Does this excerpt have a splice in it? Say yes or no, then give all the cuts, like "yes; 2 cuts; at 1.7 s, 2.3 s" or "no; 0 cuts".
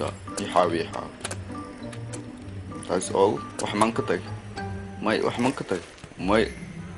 yes; 1 cut; at 2.8 s